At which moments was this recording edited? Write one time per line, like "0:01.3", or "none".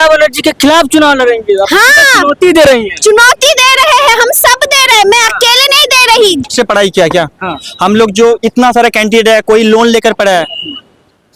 0:06.5